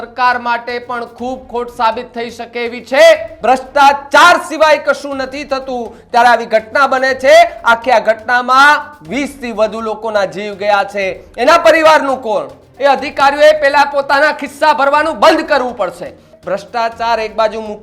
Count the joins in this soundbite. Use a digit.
3